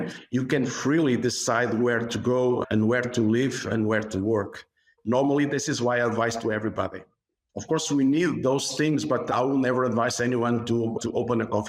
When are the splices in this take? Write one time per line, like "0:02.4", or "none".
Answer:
none

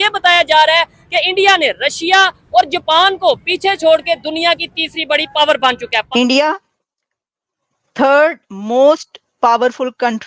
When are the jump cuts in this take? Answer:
0:05.9

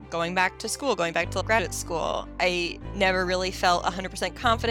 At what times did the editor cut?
0:01.4

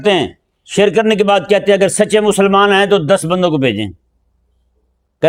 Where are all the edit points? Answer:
none

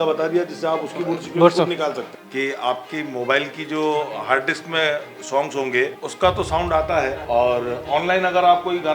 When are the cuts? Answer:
0:02.0
0:06.0
0:07.2

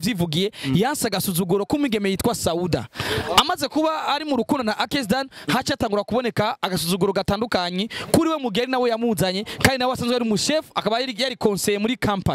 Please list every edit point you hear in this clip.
none

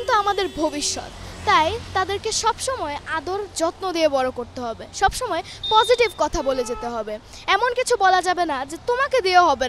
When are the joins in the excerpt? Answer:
none

